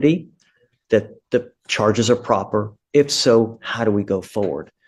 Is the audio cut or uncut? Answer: uncut